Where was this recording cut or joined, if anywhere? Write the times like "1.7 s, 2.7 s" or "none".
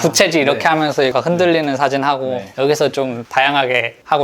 1.1 s